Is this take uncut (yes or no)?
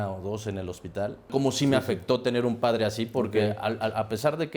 no